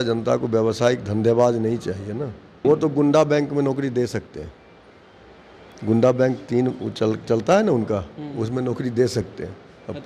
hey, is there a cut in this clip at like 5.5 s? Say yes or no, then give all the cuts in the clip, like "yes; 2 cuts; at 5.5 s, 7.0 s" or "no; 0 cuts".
no; 1 cut; at 2.6 s